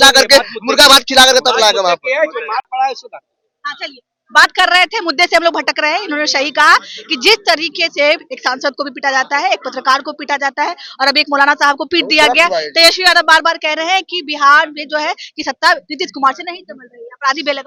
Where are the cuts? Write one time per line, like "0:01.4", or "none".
none